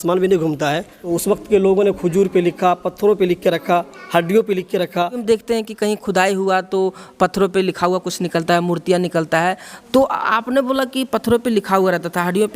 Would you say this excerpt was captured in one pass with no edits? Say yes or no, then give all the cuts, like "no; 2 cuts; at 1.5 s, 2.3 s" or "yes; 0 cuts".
no; 2 cuts; at 1.0 s, 5.2 s